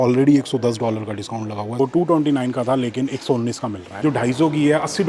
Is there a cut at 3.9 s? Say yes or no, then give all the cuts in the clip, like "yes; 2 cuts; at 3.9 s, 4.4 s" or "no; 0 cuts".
yes; 2 cuts; at 1.8 s, 3.9 s